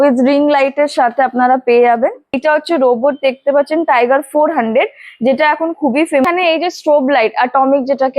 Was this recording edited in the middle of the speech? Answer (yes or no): yes